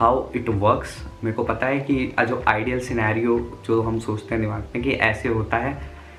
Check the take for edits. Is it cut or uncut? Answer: uncut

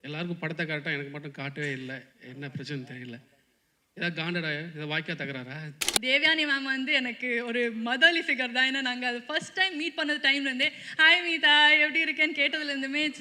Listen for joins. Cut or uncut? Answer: cut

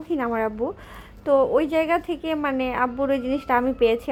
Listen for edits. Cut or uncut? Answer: uncut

